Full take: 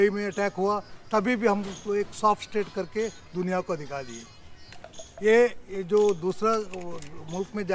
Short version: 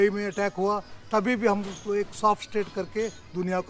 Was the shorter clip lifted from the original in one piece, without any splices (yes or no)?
yes